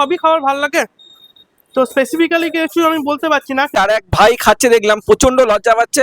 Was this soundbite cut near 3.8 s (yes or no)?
yes